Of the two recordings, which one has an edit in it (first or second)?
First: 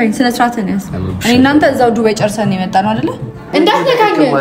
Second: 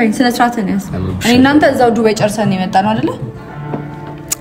first